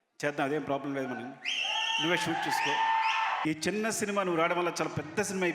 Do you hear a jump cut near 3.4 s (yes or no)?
yes